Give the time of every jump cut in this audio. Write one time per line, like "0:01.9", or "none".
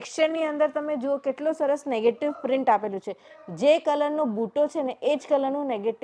none